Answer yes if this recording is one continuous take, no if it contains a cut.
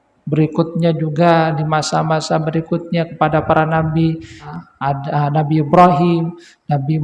no